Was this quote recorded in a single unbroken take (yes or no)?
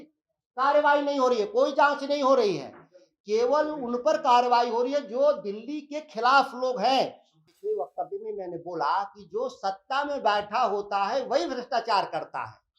no